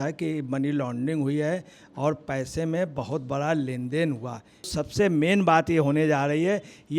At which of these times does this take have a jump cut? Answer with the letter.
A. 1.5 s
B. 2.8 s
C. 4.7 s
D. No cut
C